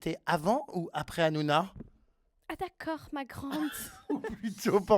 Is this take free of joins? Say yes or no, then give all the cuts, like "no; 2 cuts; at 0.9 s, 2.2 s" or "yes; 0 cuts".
yes; 0 cuts